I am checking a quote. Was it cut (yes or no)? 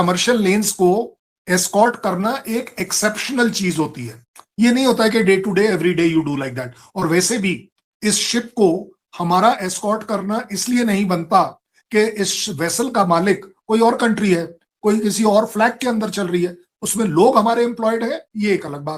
no